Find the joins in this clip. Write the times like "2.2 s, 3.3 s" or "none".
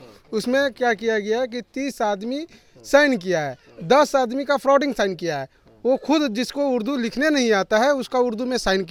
none